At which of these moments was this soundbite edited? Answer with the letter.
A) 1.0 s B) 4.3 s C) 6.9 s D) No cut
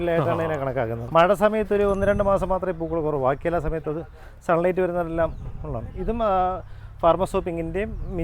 A